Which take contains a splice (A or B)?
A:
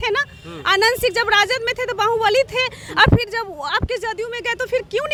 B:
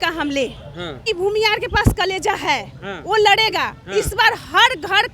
B